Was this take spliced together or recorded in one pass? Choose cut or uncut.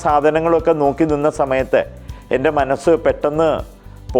uncut